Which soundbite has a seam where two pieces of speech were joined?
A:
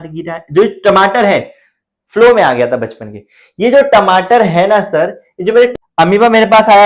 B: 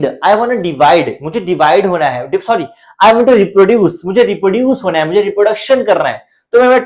A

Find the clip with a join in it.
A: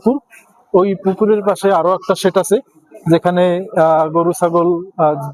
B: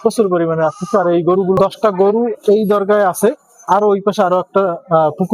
B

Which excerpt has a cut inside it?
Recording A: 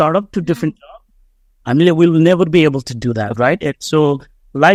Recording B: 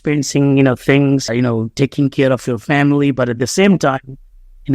B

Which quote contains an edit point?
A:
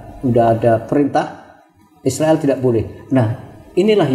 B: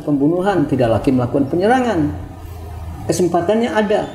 B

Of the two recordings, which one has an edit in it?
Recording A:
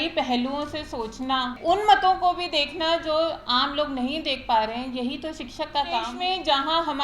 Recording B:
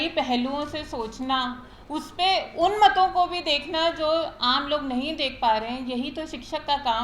A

